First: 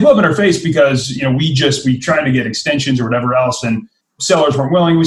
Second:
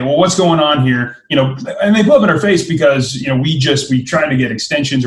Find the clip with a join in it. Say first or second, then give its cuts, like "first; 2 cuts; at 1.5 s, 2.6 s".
first; 1 cut; at 4.2 s